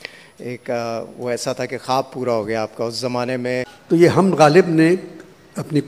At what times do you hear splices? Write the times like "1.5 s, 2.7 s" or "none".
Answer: 3.8 s